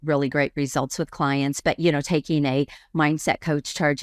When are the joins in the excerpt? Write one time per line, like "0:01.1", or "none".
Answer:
none

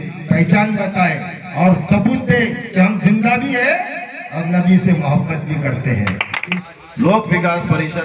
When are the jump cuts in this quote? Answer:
0:06.5

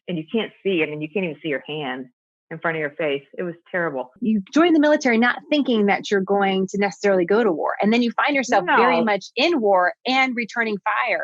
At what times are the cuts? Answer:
0:04.2

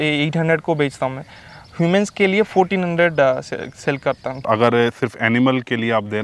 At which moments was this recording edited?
0:04.4

